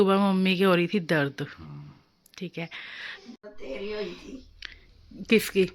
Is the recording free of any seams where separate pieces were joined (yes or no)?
no